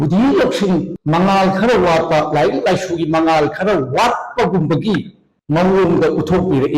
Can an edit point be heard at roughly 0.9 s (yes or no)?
yes